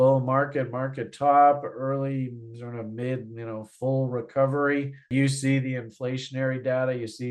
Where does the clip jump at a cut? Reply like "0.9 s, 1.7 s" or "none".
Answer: none